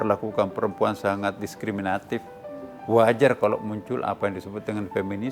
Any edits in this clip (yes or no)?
no